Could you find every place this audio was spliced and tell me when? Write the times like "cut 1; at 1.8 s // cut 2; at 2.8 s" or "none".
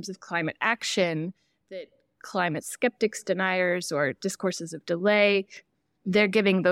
none